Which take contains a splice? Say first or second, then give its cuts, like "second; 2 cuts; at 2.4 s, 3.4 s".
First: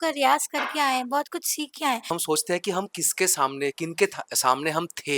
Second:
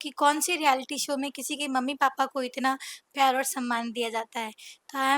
first; 1 cut; at 2.1 s